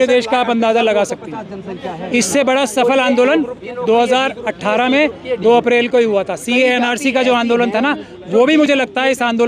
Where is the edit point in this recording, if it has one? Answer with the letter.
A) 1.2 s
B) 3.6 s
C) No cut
C